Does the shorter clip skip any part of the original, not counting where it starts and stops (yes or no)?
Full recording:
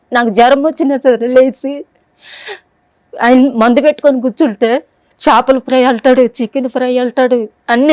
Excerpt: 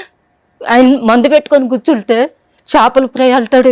no